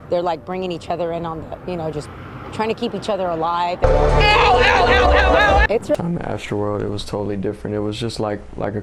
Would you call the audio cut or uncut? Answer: cut